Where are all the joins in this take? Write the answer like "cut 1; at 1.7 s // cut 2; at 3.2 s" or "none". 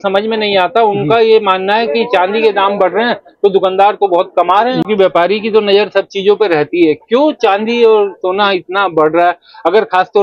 cut 1; at 4.8 s